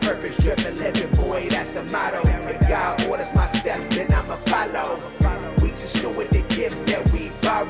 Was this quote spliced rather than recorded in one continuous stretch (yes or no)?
no